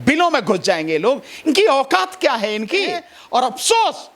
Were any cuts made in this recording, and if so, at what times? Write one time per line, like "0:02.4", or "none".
0:03.1